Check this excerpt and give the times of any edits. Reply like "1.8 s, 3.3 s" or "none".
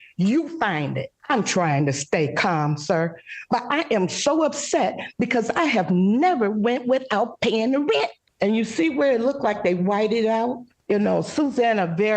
1.1 s, 8.2 s, 10.7 s

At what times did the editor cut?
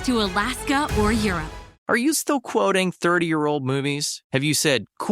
1.7 s

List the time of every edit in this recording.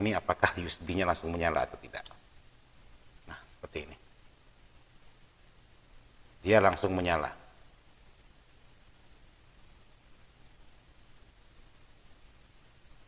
none

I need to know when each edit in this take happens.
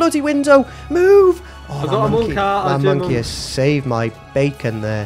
none

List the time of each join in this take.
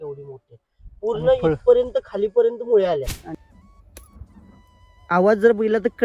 3.2 s

